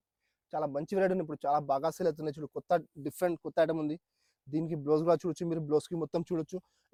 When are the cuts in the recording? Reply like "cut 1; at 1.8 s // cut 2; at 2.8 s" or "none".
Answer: none